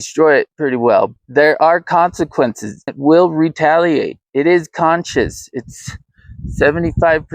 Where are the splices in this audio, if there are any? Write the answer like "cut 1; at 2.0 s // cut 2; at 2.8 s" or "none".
cut 1; at 1.1 s // cut 2; at 2.9 s // cut 3; at 4.2 s